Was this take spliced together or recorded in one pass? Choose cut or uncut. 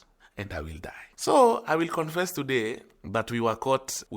cut